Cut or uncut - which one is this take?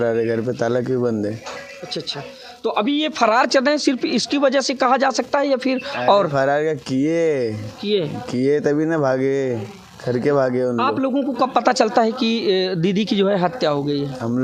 uncut